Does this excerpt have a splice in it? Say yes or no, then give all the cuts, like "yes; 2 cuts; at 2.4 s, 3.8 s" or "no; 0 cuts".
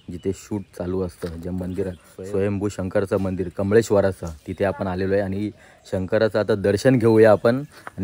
no; 0 cuts